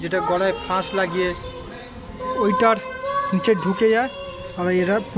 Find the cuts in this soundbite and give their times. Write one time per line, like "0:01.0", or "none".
none